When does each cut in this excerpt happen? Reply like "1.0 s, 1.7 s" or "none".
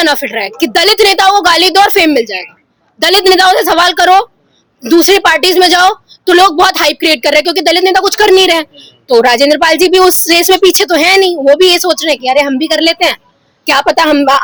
none